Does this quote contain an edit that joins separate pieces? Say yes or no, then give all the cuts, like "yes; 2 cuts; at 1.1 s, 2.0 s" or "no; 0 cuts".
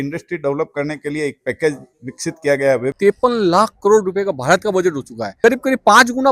yes; 2 cuts; at 2.9 s, 5.2 s